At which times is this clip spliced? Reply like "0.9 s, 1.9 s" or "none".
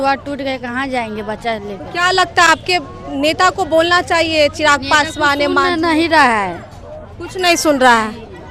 none